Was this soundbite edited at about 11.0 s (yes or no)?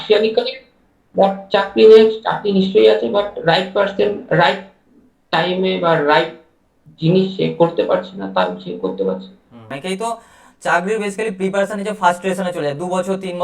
no